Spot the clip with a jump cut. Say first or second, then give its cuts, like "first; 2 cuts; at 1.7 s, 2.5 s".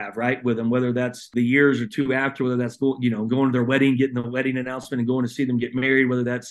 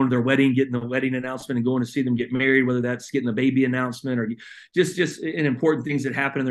first; 1 cut; at 1.3 s